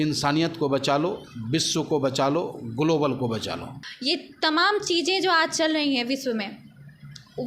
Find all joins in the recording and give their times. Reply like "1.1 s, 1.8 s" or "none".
none